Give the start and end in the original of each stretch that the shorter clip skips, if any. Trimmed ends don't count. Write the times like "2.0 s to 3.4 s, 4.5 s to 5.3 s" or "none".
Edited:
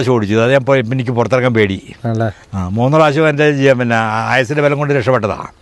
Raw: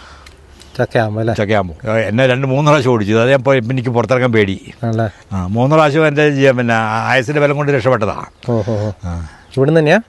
none